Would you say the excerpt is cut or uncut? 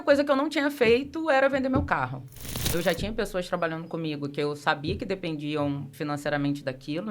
cut